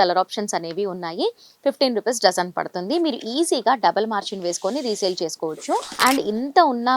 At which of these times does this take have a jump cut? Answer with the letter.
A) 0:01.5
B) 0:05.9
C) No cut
B